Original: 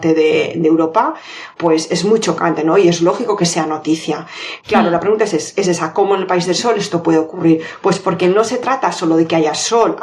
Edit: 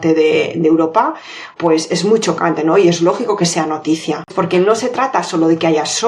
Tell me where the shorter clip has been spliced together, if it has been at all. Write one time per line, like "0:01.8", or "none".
0:04.3